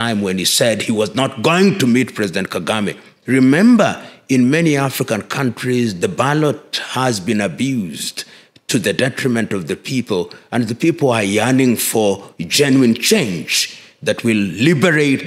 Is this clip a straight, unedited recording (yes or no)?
no